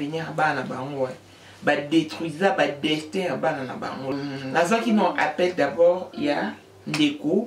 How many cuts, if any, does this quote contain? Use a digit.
1